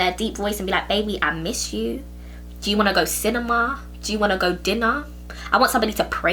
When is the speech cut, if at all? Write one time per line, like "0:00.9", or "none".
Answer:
none